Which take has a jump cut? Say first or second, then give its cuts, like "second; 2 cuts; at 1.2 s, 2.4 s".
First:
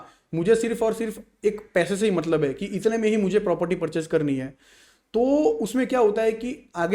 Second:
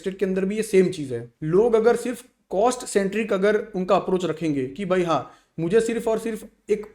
second; 1 cut; at 1.3 s